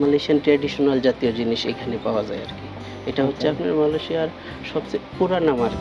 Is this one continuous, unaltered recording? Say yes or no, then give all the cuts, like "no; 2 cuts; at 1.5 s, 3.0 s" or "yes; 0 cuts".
yes; 0 cuts